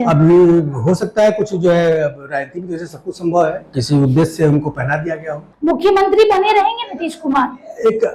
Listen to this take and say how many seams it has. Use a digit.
2